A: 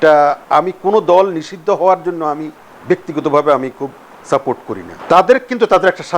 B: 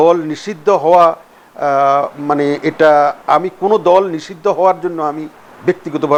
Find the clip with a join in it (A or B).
A